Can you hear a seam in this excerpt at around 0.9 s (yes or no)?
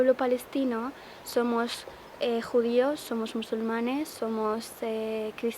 no